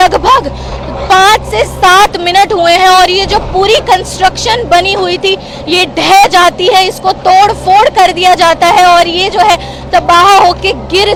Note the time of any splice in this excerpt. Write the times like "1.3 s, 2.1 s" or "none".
none